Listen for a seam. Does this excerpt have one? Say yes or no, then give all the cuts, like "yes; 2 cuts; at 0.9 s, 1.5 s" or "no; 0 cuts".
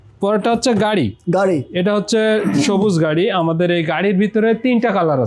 no; 0 cuts